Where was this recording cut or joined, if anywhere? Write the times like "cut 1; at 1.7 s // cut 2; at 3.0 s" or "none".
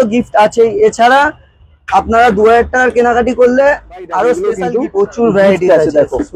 cut 1; at 4.6 s